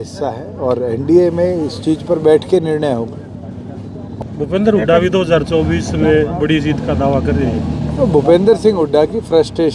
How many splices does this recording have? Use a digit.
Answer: 1